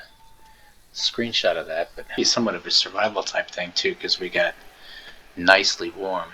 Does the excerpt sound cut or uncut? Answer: cut